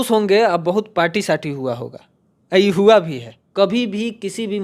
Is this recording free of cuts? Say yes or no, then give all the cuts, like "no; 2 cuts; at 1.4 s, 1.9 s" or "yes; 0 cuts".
no; 1 cut; at 3.4 s